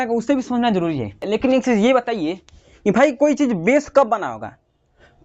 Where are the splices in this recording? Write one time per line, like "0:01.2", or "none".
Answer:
0:01.2